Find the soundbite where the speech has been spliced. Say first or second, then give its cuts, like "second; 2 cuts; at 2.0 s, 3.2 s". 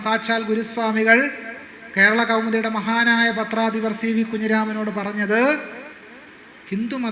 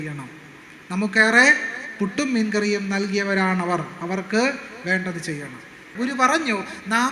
second; 1 cut; at 5.9 s